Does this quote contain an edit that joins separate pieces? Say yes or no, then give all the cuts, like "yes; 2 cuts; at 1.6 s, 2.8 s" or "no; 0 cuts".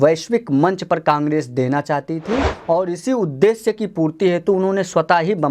no; 0 cuts